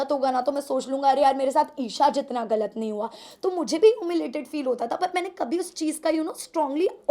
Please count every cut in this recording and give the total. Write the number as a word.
zero